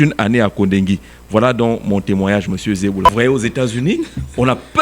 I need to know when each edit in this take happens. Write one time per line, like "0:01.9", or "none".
0:03.1